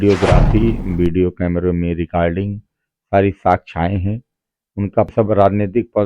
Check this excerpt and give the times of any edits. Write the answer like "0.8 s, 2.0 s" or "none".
5.1 s